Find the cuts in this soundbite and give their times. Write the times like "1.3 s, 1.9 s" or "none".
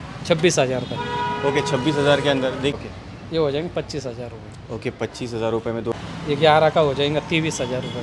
2.7 s, 5.9 s